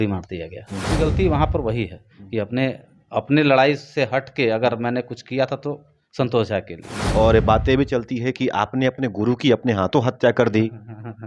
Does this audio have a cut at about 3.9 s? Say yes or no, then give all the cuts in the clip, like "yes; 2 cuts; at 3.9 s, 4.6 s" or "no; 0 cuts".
no; 2 cuts; at 0.9 s, 7.0 s